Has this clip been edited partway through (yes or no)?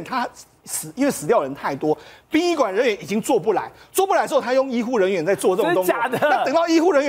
no